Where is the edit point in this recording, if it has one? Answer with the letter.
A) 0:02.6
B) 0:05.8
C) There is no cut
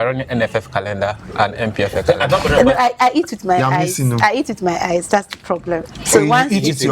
A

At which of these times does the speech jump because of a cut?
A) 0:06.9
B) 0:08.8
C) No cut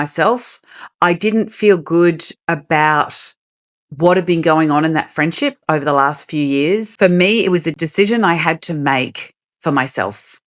A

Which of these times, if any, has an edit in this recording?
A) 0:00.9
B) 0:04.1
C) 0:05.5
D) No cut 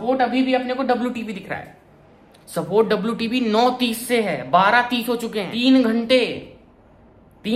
C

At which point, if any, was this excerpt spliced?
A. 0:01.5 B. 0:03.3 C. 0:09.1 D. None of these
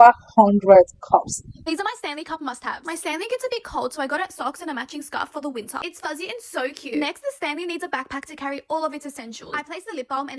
A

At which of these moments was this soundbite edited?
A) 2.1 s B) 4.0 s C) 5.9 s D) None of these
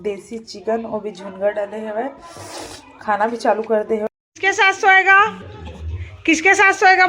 B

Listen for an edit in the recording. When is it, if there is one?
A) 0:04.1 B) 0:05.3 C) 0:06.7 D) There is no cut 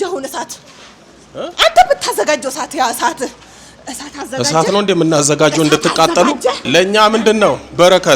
C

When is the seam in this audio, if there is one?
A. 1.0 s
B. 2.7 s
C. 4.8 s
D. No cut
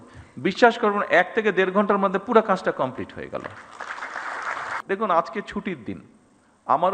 C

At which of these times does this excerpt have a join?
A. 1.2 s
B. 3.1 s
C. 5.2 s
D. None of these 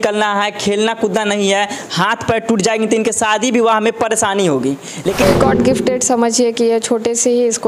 C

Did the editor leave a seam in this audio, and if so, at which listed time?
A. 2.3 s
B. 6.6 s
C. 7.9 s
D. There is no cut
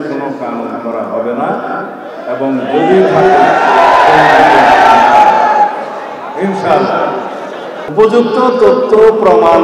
C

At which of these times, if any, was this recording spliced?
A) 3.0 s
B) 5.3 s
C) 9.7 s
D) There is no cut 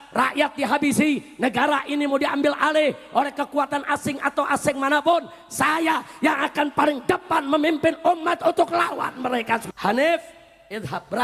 C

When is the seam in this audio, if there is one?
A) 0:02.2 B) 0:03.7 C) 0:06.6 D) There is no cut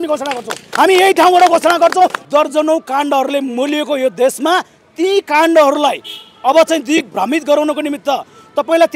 A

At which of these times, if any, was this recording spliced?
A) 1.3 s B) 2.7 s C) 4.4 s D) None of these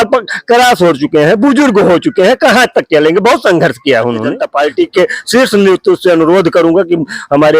C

